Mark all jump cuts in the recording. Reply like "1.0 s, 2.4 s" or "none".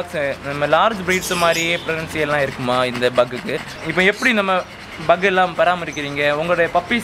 3.8 s